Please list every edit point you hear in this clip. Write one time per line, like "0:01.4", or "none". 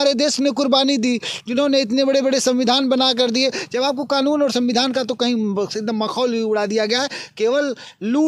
none